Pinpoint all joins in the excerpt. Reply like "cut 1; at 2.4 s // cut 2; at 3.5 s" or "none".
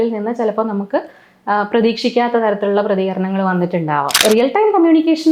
cut 1; at 4.2 s